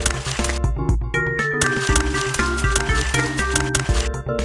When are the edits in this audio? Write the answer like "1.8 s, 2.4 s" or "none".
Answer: 3.0 s